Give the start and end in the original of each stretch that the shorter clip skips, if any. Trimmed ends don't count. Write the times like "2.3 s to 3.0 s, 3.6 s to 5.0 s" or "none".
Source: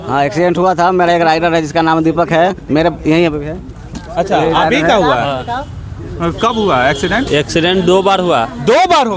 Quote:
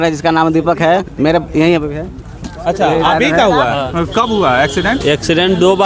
5.4 s to 6.1 s